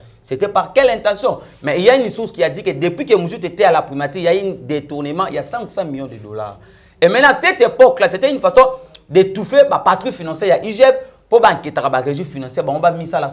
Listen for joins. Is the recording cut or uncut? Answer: uncut